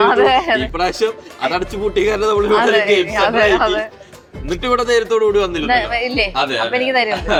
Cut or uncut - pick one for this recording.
uncut